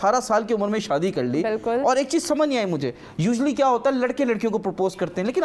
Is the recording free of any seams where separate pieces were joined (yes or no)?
yes